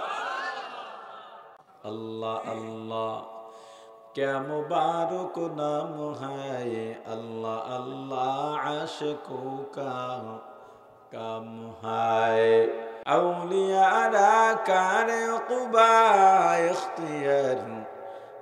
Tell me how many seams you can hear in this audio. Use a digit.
2